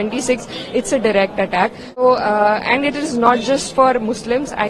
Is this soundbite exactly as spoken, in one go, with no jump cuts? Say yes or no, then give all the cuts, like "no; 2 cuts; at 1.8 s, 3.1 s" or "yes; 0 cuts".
no; 1 cut; at 2.0 s